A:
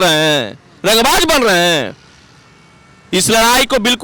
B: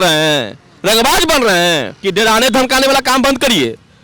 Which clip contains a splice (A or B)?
B